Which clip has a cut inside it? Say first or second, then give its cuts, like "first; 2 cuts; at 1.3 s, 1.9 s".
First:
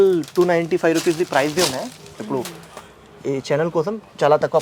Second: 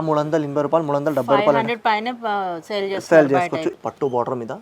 second; 1 cut; at 3.7 s